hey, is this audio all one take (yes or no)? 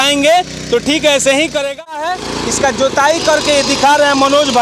no